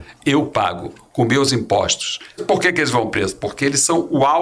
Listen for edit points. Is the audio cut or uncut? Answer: cut